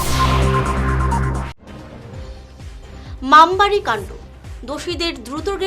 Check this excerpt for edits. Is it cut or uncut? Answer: cut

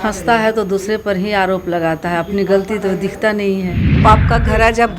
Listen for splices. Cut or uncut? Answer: cut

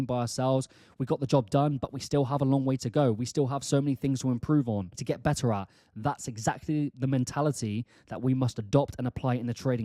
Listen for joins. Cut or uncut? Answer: cut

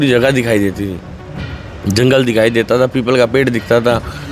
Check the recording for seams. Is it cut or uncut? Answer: uncut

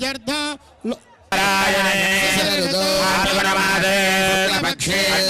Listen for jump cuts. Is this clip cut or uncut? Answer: cut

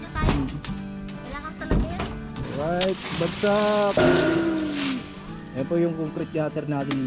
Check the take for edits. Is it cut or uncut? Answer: cut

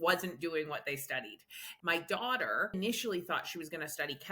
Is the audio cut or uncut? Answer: cut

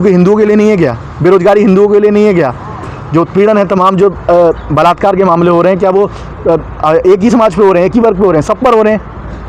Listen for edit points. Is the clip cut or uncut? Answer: uncut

